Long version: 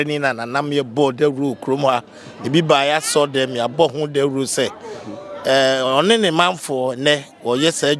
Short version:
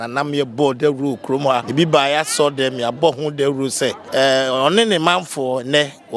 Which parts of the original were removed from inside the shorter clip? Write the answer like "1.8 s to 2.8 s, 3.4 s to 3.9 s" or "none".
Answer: 2.0 s to 2.4 s, 4.8 s to 5.3 s

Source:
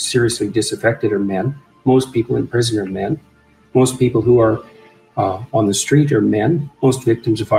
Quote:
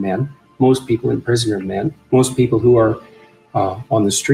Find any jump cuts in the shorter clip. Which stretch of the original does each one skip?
3.2 s to 3.6 s

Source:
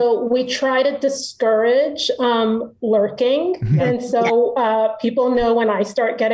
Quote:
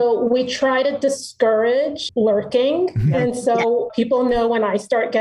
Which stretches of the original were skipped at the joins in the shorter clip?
2.0 s to 2.7 s, 4.5 s to 4.9 s

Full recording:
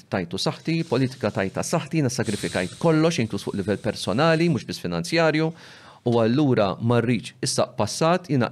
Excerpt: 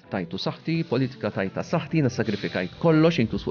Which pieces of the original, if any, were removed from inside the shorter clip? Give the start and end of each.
none

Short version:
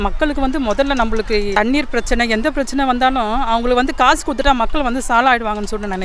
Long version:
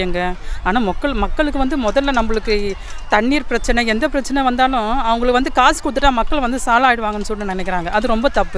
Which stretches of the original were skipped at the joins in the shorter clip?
2.7 s to 3.1 s

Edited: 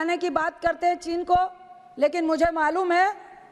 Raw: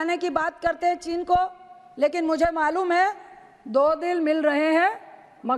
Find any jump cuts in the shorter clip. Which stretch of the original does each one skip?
none

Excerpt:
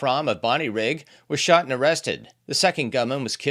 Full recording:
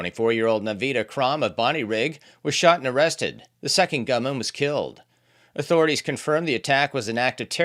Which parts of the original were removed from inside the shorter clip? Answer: none

